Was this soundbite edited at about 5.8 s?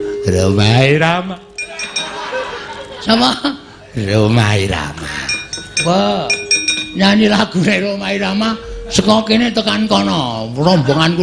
yes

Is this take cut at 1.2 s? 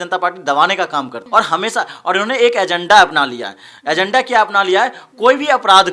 yes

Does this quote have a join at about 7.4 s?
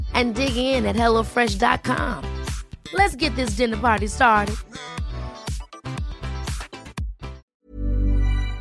yes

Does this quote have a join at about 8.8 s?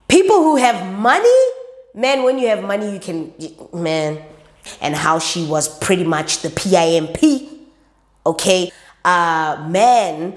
yes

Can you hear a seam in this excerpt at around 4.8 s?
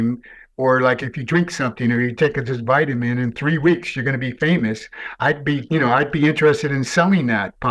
no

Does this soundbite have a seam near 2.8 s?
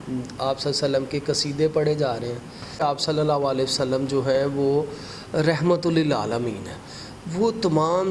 yes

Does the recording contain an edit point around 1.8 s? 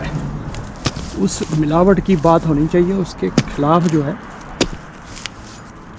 no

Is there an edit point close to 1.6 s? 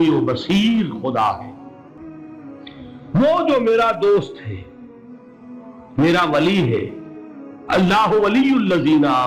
no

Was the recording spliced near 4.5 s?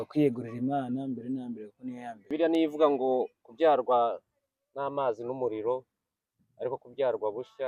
no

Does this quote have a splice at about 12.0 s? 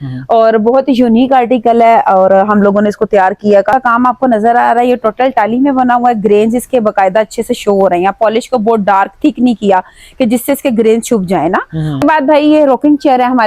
yes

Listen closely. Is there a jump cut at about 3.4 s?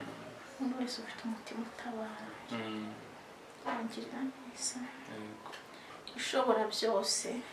no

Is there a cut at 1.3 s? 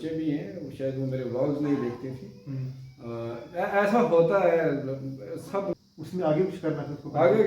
no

